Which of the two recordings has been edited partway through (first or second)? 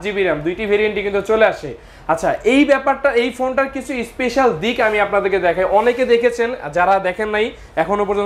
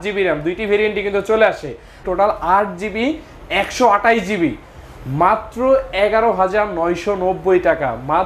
second